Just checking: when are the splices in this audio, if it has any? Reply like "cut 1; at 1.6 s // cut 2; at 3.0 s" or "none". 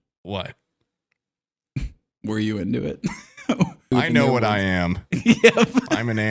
cut 1; at 3.9 s